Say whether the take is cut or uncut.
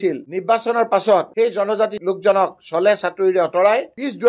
uncut